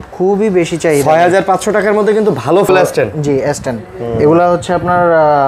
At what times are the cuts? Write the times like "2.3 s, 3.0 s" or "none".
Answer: 2.7 s